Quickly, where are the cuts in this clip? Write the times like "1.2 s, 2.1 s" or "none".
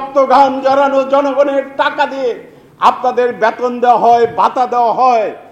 none